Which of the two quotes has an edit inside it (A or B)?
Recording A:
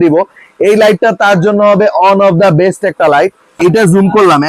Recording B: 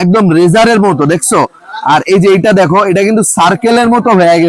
A